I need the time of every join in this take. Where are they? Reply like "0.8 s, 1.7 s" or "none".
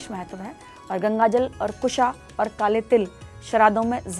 none